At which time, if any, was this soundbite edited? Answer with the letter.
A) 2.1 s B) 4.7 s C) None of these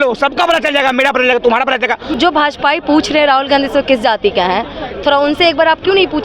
A